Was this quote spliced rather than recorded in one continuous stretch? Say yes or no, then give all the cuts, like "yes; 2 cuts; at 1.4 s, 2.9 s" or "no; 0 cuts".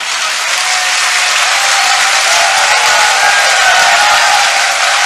no; 0 cuts